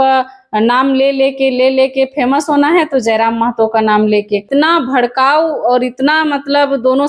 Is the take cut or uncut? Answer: cut